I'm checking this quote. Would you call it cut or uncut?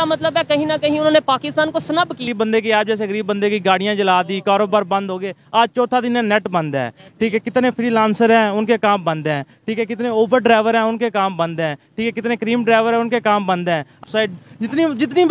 cut